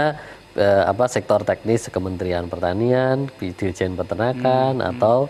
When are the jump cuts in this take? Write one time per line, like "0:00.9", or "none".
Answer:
none